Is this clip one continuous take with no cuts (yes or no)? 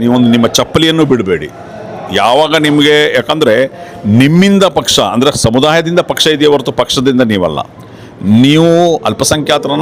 yes